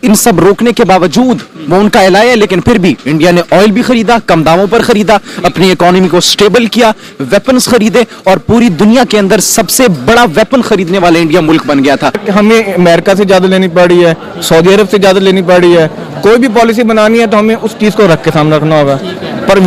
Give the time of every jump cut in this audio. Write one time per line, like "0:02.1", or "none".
0:12.2